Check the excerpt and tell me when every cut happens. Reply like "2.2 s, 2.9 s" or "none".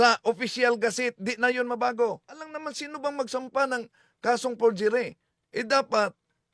2.5 s